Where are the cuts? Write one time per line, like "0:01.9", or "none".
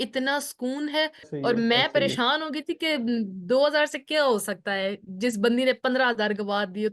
0:01.2